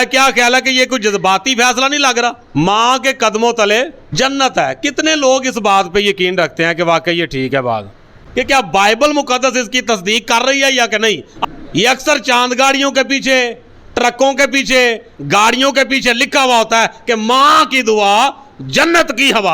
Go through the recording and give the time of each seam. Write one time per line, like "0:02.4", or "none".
0:02.6
0:04.0
0:08.2
0:11.3